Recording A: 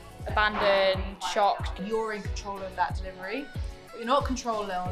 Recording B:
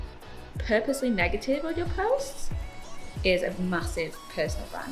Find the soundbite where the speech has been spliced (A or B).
A